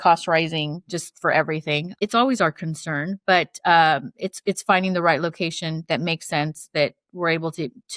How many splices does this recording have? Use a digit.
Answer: 1